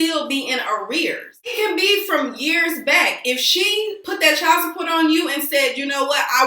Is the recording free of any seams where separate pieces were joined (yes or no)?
no